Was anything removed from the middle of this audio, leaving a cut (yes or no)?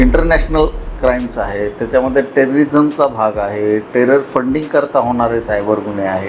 no